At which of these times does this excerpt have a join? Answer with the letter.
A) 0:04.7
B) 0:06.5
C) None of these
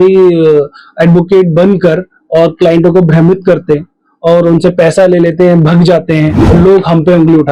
B